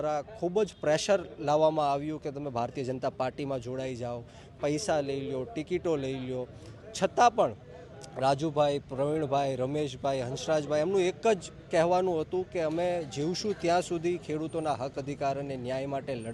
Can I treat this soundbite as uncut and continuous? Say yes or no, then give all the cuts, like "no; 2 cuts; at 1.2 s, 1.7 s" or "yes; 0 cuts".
yes; 0 cuts